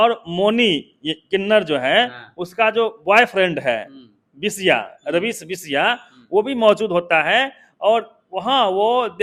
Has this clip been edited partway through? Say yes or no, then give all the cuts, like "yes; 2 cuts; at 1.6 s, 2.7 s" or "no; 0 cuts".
no; 0 cuts